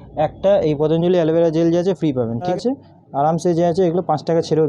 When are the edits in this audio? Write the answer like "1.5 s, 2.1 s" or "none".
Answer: 2.5 s